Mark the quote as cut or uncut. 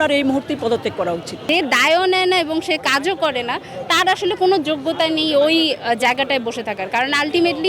cut